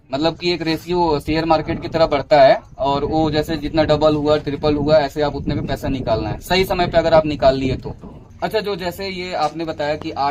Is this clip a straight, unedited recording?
yes; 0 cuts

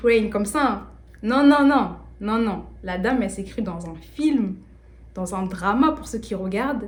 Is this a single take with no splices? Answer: yes; 0 cuts

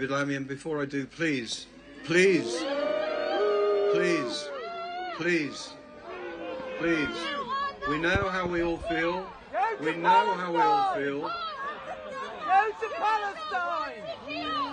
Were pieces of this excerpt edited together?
no; 0 cuts

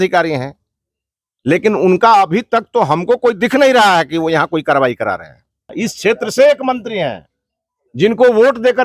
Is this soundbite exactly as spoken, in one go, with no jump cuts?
no; 1 cut; at 5.7 s

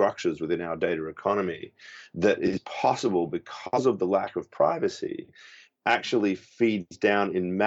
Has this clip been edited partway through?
no; 0 cuts

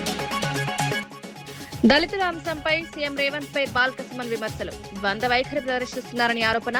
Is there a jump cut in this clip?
yes; 1 cut; at 1.0 s

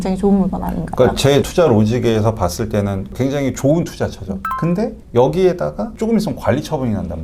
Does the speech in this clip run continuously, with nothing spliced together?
yes; 0 cuts

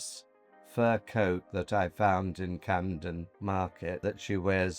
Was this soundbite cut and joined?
yes; 2 cuts; at 3.3 s, 4.0 s

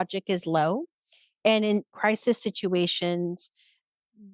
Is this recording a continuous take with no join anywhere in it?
yes; 0 cuts

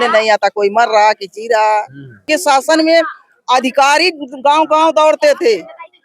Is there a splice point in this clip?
yes; 1 cut; at 2.2 s

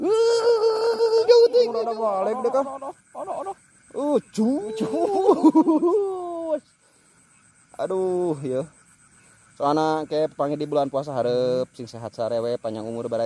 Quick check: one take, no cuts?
no; 1 cut; at 1.9 s

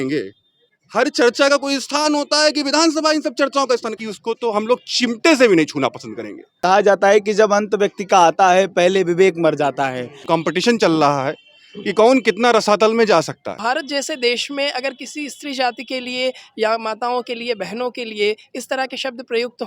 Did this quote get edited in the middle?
yes; 4 cuts; at 4.0 s, 6.6 s, 10.2 s, 13.5 s

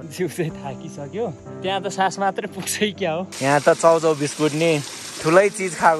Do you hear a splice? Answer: yes; 2 cuts; at 1.5 s, 3.3 s

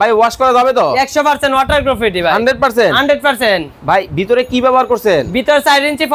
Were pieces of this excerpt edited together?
no; 0 cuts

